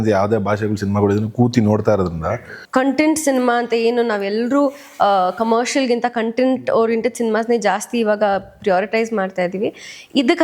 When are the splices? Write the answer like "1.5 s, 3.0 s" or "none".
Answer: 2.5 s